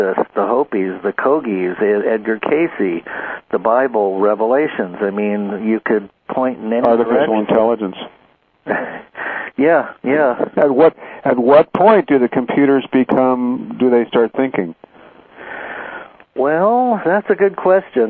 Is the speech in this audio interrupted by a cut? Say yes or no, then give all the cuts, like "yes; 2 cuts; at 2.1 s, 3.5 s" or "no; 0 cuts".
no; 0 cuts